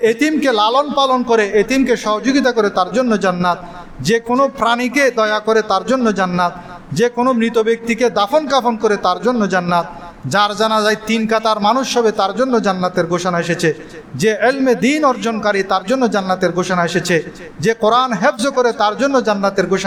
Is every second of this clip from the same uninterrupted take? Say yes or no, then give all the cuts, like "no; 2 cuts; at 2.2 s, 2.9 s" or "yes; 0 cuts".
yes; 0 cuts